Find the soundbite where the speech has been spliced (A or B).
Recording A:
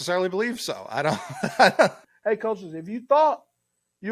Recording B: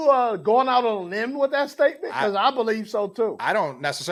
A